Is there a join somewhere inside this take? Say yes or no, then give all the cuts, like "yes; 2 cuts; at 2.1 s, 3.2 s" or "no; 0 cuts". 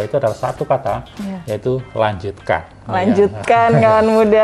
no; 0 cuts